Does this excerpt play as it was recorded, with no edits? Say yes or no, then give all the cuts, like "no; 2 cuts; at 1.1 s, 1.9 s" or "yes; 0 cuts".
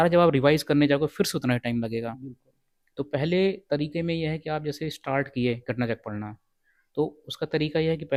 yes; 0 cuts